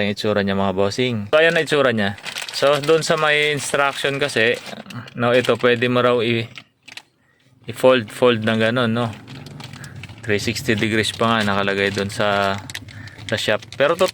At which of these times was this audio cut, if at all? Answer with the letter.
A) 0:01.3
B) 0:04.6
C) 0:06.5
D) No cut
A